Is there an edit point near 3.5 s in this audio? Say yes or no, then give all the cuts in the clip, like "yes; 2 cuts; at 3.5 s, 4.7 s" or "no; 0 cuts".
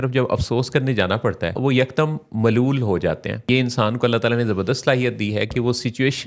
yes; 2 cuts; at 1.6 s, 3.5 s